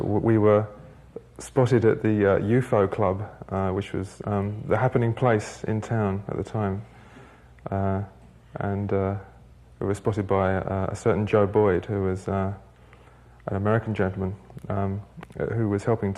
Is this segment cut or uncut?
cut